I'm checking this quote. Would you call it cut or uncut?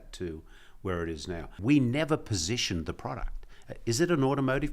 cut